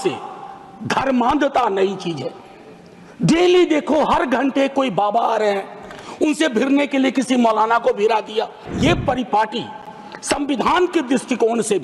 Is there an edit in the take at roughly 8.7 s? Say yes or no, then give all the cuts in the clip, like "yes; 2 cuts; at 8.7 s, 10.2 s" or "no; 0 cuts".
yes; 1 cut; at 8.7 s